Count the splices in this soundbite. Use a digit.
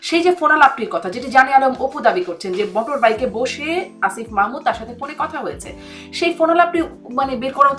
0